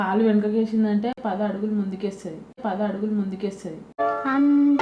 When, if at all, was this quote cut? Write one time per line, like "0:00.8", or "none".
none